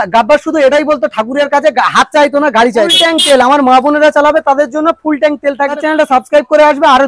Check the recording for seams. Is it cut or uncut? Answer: cut